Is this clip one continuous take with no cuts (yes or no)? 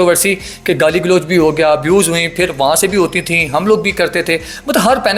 yes